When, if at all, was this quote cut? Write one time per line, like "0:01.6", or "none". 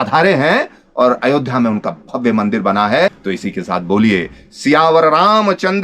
0:03.2